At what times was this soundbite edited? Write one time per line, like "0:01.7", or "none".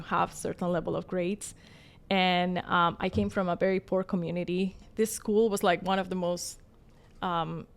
0:04.8